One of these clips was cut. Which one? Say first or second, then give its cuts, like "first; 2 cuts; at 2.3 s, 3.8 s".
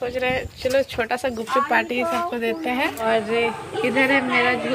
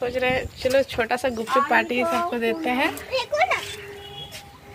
first; 1 cut; at 3.0 s